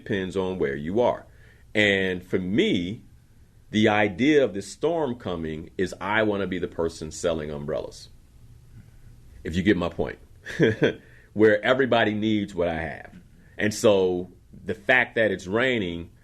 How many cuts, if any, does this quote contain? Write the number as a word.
one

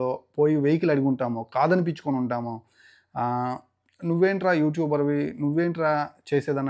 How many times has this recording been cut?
zero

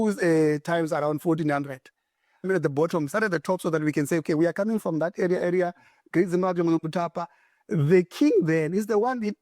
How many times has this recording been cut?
one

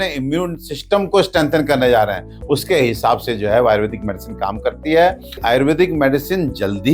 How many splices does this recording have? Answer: one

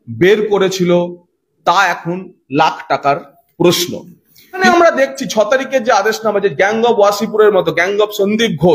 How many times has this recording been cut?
one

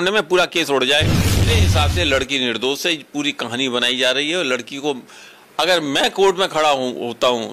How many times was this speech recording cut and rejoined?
one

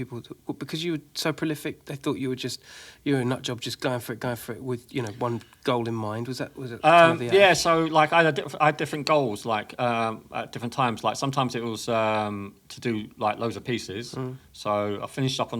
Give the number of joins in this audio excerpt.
zero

